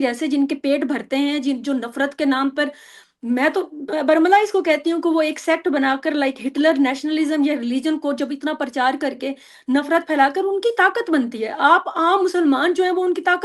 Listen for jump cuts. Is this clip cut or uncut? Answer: uncut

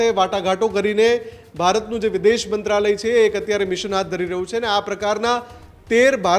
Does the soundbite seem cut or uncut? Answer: uncut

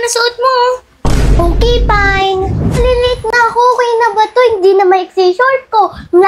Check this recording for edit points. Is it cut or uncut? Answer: cut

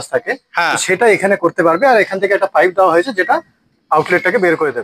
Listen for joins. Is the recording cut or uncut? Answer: uncut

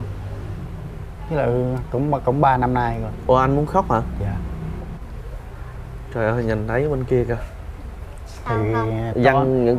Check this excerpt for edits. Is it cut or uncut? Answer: cut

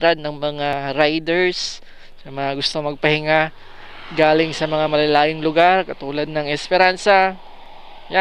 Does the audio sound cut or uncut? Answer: uncut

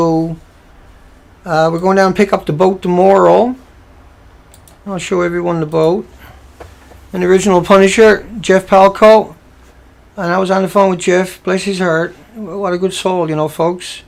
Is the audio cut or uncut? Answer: uncut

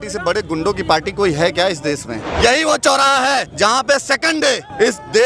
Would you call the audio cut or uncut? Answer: cut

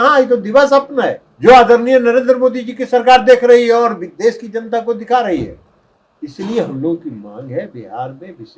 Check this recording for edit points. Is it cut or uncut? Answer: cut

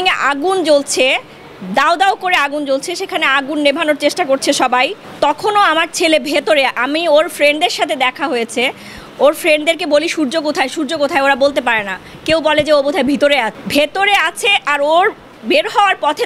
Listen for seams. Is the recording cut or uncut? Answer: cut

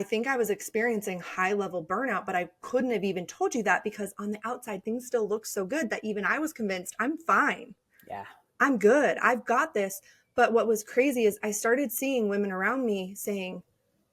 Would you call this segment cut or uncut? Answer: uncut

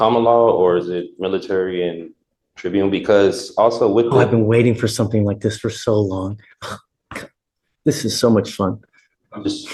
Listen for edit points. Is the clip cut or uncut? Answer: uncut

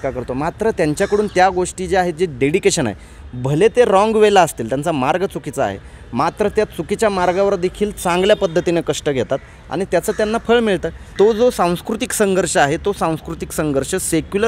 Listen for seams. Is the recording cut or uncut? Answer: cut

